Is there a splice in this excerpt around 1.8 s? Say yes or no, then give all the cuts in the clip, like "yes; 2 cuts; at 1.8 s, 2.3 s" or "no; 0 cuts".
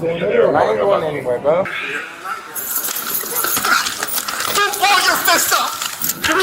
yes; 1 cut; at 1.8 s